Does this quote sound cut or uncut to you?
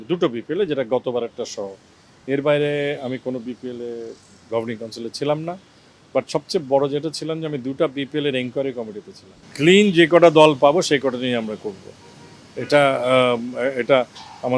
cut